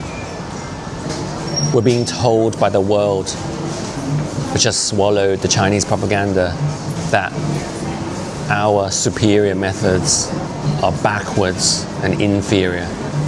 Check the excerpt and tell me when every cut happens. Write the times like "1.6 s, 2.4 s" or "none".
1.1 s, 7.0 s, 10.5 s